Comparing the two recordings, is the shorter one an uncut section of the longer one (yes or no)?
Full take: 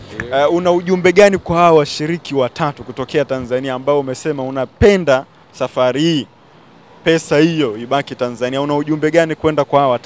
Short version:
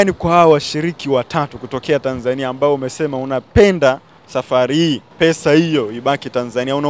no